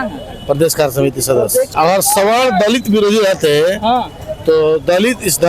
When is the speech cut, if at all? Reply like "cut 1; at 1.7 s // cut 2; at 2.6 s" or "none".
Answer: cut 1; at 1.7 s

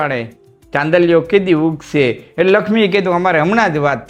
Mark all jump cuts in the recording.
none

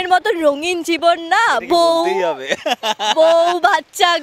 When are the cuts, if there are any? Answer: none

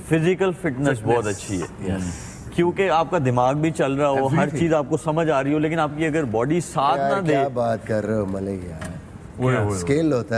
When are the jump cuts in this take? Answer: none

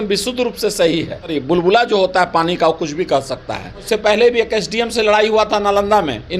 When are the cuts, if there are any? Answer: cut 1; at 1.4 s // cut 2; at 3.8 s

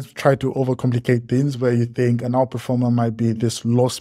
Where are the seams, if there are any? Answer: none

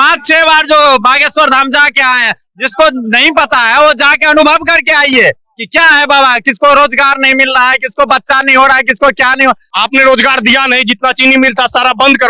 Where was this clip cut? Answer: cut 1; at 9.7 s

